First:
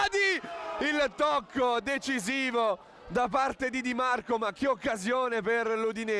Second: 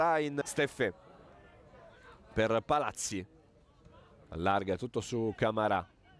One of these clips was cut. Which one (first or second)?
first